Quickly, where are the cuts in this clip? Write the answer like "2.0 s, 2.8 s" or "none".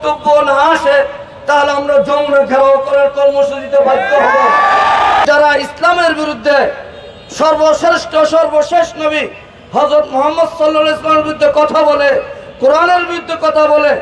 5.2 s